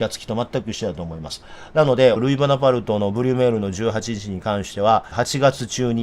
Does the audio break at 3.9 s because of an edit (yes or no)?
no